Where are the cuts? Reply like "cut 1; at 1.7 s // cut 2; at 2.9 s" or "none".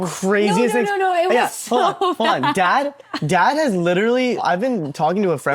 cut 1; at 4.4 s